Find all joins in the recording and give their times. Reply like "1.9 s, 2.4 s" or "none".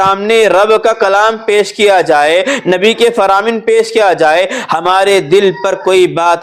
none